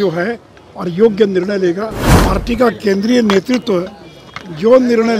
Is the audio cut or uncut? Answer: cut